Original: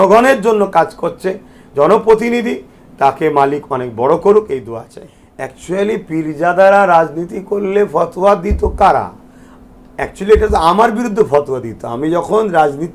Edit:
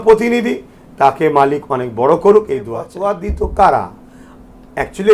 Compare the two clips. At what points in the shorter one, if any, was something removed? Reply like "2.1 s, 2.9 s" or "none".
2.9 s